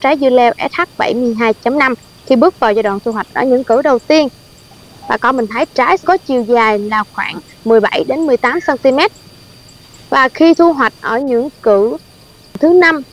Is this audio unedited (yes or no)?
yes